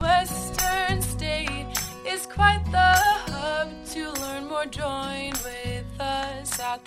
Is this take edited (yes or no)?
no